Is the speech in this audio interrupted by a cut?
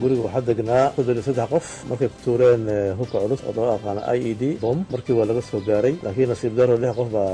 yes; 2 cuts; at 1.8 s, 6.0 s

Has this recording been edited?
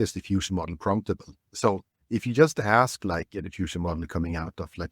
yes; 1 cut; at 1.4 s

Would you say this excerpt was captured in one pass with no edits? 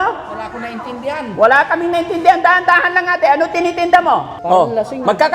no; 1 cut; at 4.3 s

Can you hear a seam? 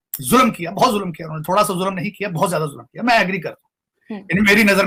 no; 0 cuts

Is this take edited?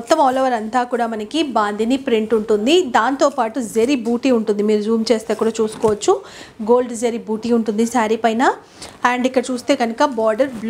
no; 0 cuts

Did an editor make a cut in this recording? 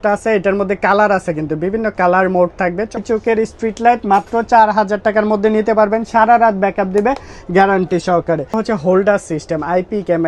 yes; 2 cuts; at 3.0 s, 8.6 s

